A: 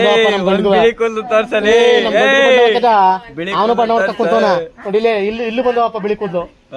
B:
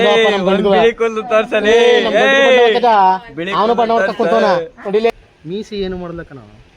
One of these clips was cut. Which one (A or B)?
B